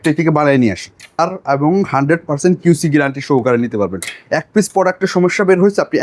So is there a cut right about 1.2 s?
yes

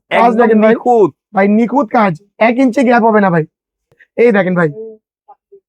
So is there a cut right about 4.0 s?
yes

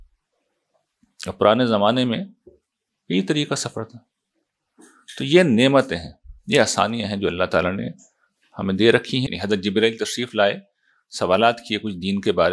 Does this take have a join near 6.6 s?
no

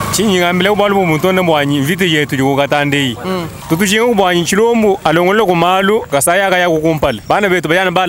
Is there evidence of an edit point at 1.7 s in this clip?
no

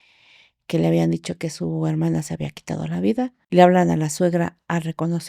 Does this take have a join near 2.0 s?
no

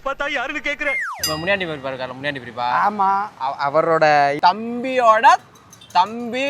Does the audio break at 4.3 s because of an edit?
yes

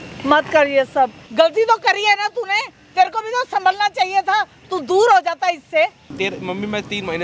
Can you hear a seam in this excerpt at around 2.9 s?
no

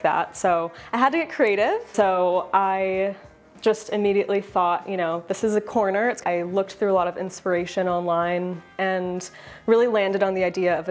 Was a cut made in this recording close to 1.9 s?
yes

